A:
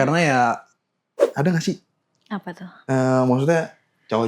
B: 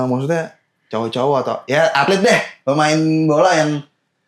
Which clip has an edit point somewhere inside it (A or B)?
A